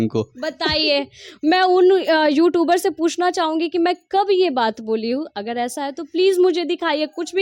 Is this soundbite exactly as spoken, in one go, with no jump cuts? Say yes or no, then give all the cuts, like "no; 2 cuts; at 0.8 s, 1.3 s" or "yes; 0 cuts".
yes; 0 cuts